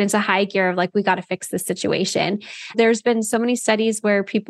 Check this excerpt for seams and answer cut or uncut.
cut